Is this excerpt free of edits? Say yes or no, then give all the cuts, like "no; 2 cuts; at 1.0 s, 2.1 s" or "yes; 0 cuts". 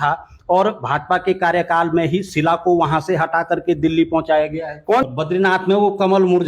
no; 1 cut; at 5.1 s